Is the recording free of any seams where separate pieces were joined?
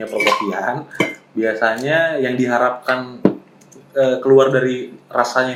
yes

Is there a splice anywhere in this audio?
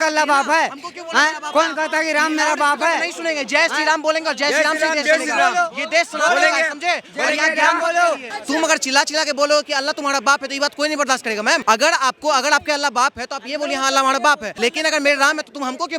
yes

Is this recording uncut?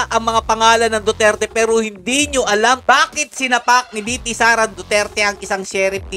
no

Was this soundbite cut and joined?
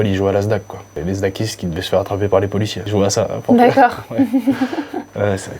yes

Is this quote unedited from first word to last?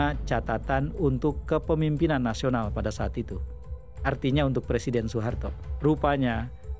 no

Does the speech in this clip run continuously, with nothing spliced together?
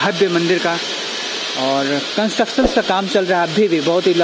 yes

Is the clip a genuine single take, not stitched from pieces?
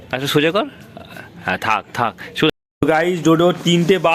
no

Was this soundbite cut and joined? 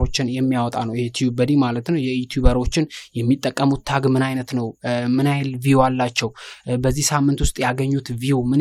no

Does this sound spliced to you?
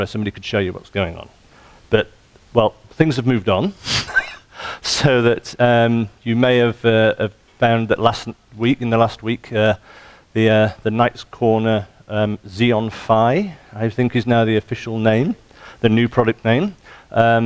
no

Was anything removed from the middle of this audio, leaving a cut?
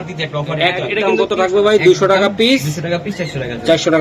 yes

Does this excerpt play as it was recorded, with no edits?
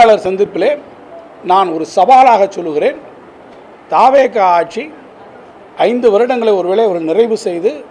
yes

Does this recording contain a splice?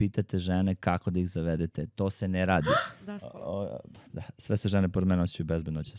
yes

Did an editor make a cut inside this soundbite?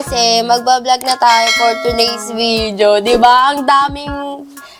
no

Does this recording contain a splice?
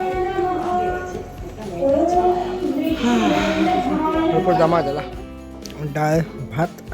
yes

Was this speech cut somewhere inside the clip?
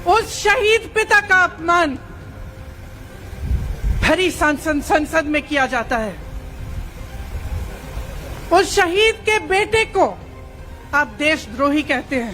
no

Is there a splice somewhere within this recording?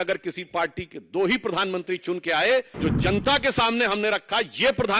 yes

